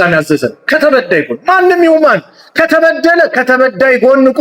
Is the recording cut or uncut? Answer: uncut